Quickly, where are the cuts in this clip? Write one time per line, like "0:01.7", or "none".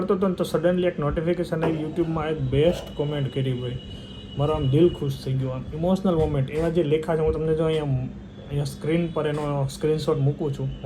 none